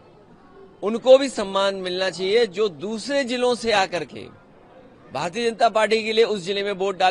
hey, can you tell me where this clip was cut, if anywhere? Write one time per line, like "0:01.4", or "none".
none